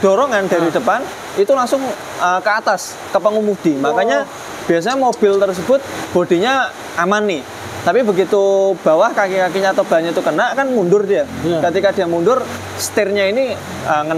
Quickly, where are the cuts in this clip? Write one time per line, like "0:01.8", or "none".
none